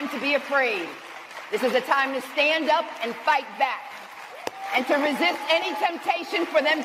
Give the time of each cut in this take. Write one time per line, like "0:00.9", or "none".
none